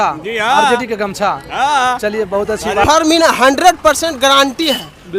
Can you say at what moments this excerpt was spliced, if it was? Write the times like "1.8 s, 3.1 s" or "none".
2.8 s